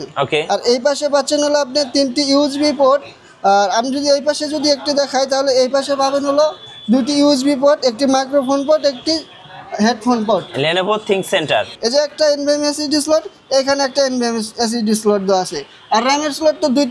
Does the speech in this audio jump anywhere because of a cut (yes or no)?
yes